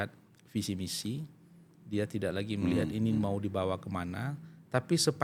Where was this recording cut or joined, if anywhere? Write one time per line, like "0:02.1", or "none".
none